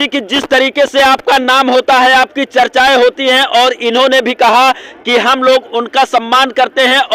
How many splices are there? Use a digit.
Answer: 0